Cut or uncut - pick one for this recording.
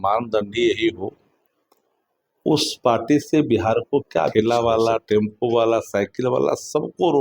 cut